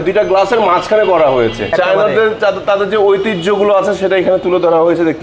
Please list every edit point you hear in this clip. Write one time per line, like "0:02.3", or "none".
0:01.7